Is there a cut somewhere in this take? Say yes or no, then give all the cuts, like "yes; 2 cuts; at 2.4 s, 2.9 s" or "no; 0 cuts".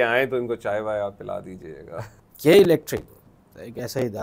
yes; 1 cut; at 2.0 s